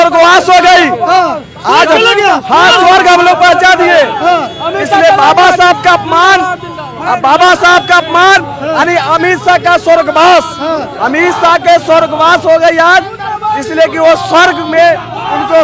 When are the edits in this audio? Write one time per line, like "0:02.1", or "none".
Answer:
none